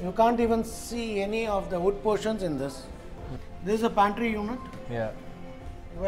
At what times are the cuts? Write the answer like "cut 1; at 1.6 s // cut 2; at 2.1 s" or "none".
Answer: cut 1; at 3.4 s